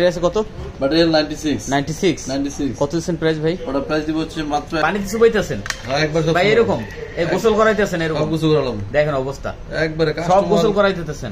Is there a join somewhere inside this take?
yes; 1 cut; at 4.8 s

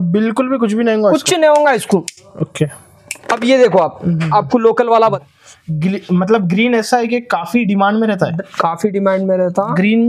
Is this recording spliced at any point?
yes; 1 cut; at 5.2 s

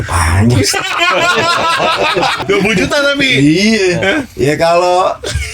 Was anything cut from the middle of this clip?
yes; 1 cut; at 2.4 s

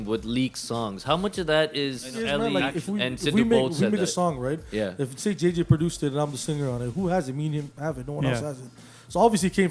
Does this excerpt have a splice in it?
yes; 1 cut; at 2.2 s

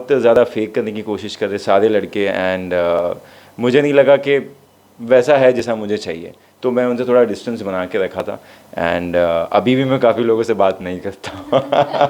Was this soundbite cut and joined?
no; 0 cuts

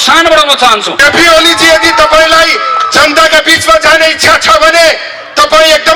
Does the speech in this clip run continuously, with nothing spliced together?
no; 1 cut; at 1.0 s

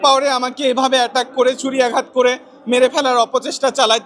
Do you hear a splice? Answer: no; 0 cuts

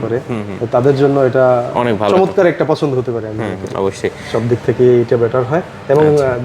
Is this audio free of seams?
yes; 0 cuts

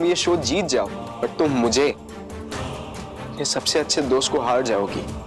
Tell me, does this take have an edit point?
yes; 1 cut; at 1.0 s

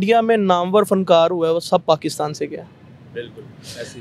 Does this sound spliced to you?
no; 0 cuts

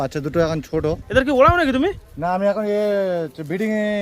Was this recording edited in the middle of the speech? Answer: yes; 1 cut; at 1.0 s

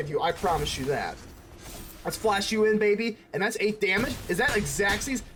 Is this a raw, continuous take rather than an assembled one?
yes; 0 cuts

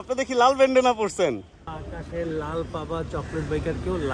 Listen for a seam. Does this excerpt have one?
yes; 1 cut; at 1.7 s

